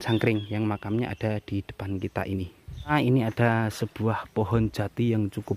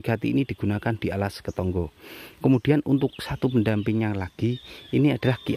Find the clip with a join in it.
first; 1 cut; at 2.9 s

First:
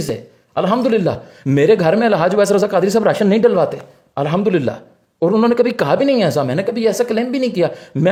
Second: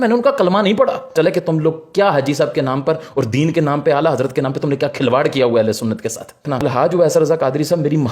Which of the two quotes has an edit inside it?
second; 2 cuts; at 1.1 s, 6.4 s

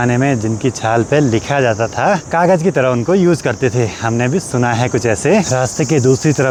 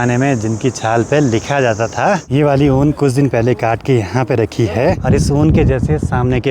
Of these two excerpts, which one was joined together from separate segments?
second; 2 cuts; at 2.2 s, 5.0 s

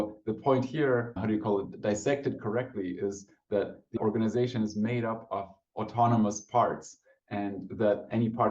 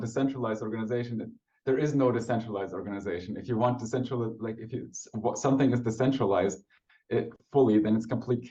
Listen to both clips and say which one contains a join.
first; 2 cuts; at 1.2 s, 3.9 s

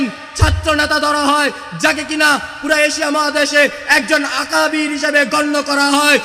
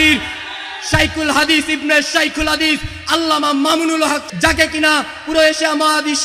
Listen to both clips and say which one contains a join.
second; 1 cut; at 4.3 s

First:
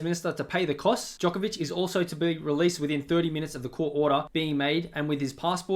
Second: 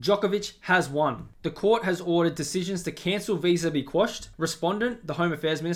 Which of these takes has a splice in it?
first; 2 cuts; at 1.1 s, 4.3 s

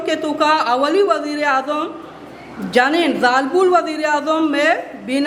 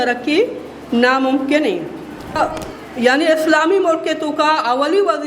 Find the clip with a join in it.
second; 1 cut; at 2.4 s

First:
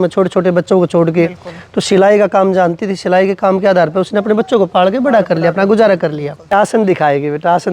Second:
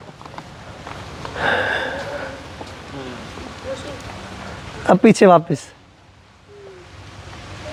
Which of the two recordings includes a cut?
first; 1 cut; at 6.5 s

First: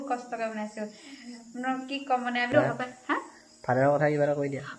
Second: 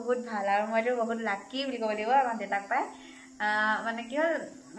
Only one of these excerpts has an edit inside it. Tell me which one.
first; 1 cut; at 2.5 s

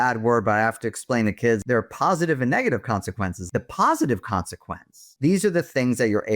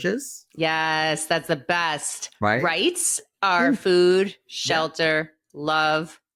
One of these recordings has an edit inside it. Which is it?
first; 3 cuts; at 1.6 s, 3.4 s, 5.0 s

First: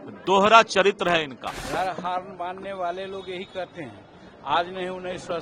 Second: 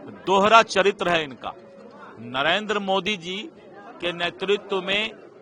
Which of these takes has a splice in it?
first; 1 cut; at 1.6 s

